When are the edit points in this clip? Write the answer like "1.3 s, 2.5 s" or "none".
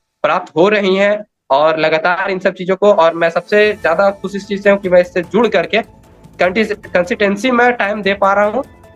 none